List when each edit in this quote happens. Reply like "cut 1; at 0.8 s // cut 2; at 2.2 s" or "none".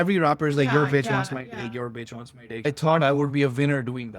cut 1; at 2.7 s